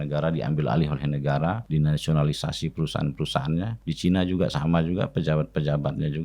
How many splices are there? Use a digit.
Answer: 2